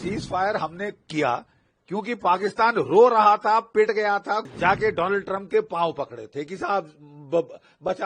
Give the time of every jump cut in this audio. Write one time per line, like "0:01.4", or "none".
0:04.4